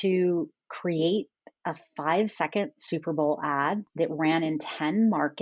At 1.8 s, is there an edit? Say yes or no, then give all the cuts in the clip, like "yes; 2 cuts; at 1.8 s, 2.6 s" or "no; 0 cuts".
no; 1 cut; at 3.9 s